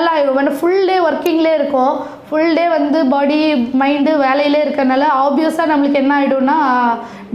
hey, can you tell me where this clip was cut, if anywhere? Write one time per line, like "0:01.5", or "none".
none